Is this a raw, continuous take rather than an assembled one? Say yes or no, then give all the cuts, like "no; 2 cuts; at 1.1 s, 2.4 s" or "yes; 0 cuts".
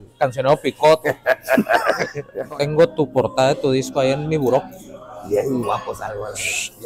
no; 1 cut; at 2.3 s